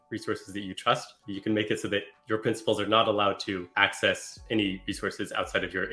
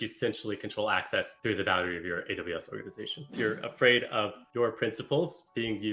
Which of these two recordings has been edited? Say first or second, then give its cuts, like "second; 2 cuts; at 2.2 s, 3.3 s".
second; 1 cut; at 3.3 s